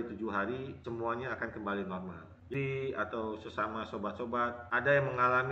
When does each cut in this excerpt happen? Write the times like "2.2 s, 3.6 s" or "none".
2.5 s